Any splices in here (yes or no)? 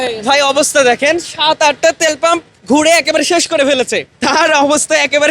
yes